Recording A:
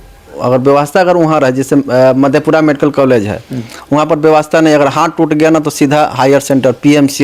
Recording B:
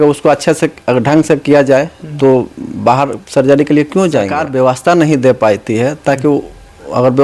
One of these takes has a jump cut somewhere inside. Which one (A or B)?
B